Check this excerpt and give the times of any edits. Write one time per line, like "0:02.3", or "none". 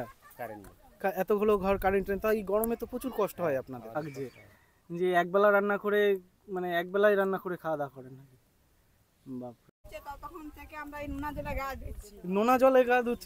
0:03.9
0:09.8